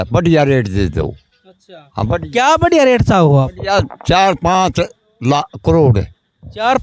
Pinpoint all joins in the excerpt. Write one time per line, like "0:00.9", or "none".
none